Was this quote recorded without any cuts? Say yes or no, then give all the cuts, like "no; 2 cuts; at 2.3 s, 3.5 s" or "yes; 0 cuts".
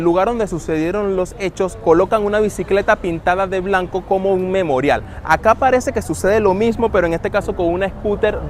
yes; 0 cuts